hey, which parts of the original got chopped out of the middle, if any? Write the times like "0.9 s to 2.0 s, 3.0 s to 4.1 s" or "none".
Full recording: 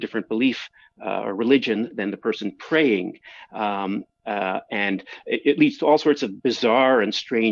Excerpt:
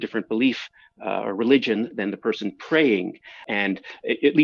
3.4 s to 4.7 s